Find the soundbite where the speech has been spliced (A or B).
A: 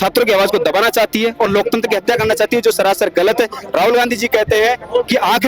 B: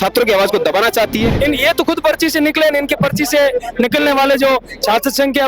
B